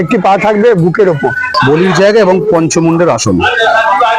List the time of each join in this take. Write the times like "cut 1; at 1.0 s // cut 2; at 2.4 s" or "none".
cut 1; at 1.5 s